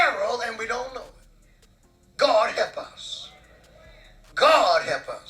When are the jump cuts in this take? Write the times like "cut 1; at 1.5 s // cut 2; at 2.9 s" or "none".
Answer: cut 1; at 1.5 s